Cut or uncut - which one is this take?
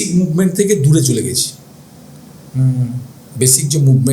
uncut